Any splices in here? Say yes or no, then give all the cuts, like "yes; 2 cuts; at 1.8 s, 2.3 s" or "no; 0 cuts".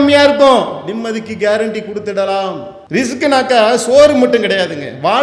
yes; 1 cut; at 2.7 s